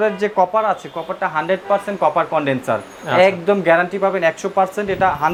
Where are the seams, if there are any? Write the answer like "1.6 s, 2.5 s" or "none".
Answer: none